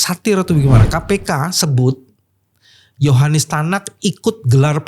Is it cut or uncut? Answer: uncut